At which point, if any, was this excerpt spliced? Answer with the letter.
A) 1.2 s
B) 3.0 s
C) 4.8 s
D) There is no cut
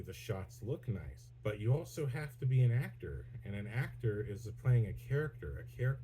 A